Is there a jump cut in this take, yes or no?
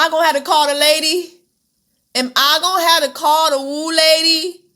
no